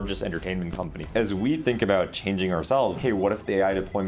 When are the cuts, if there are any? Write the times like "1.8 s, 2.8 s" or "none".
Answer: 1.0 s, 2.9 s